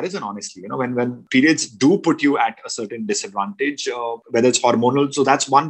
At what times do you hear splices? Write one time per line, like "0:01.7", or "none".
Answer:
0:01.2
0:04.2